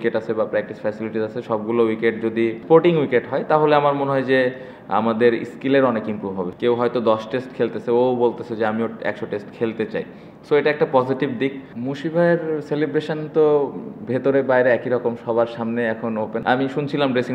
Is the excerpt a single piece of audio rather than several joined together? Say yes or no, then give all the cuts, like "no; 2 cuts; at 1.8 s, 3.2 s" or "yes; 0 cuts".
no; 4 cuts; at 2.6 s, 6.5 s, 11.7 s, 16.4 s